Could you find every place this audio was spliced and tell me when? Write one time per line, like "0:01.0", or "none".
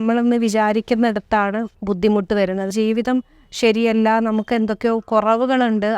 0:01.7
0:02.7